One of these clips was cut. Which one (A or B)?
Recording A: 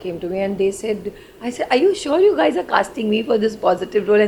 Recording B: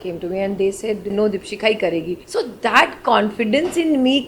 B